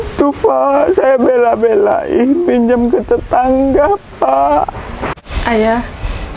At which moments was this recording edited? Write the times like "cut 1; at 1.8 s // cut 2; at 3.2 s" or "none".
cut 1; at 5.2 s